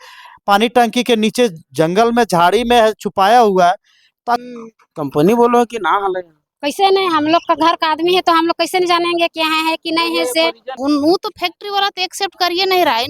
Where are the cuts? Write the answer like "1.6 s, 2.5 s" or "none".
4.4 s, 10.8 s